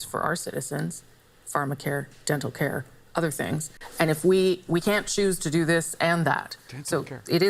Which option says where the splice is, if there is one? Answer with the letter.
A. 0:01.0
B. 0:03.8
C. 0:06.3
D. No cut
B